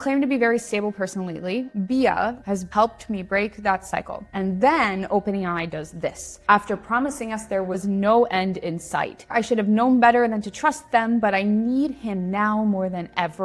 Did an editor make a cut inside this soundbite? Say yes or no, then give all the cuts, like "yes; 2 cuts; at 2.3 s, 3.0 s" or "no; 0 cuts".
yes; 2 cuts; at 2.6 s, 9.3 s